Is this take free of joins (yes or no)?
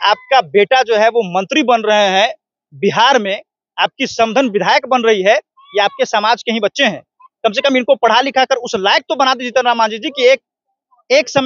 yes